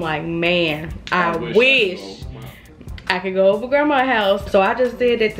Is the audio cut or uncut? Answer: cut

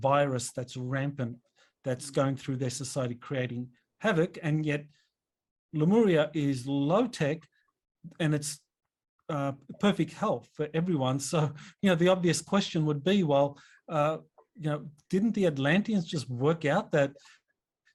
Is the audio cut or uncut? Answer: uncut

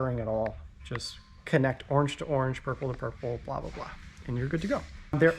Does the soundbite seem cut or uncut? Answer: uncut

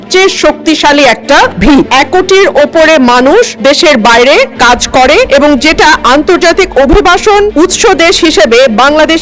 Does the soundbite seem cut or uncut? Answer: cut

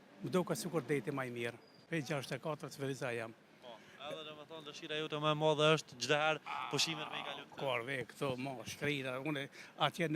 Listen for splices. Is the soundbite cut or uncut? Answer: cut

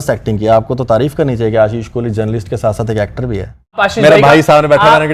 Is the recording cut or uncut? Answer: cut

